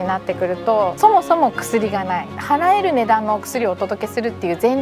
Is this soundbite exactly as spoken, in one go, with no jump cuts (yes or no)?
no